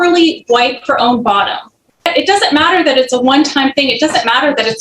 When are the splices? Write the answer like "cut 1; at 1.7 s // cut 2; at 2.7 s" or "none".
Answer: cut 1; at 2.1 s